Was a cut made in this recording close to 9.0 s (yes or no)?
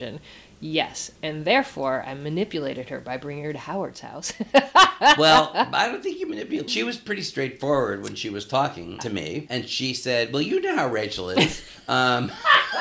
yes